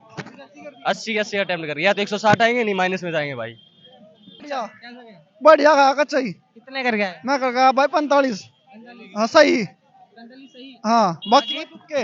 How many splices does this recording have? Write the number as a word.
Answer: one